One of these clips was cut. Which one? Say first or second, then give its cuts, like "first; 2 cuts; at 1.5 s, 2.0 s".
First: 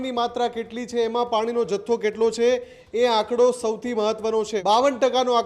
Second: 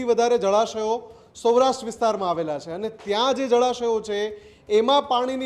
first; 1 cut; at 4.5 s